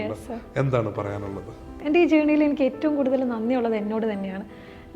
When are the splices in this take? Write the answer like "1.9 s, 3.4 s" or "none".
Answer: 1.7 s